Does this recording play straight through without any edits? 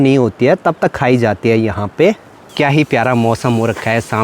no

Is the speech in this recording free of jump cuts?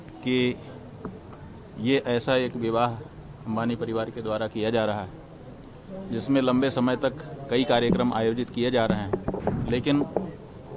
no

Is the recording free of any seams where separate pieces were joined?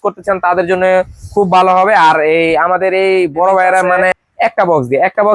no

